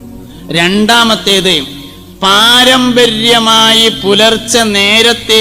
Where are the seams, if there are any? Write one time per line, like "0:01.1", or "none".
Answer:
none